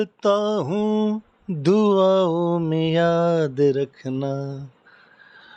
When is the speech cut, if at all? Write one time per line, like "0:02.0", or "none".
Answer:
none